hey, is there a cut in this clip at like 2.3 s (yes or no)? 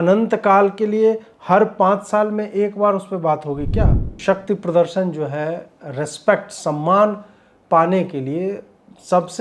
no